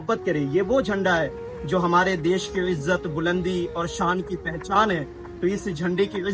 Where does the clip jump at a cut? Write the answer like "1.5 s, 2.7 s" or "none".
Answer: none